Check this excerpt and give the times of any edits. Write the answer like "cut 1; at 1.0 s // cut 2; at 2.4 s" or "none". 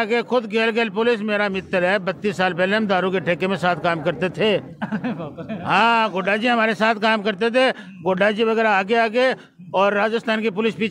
none